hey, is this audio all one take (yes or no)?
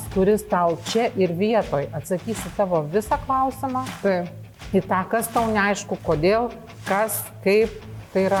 yes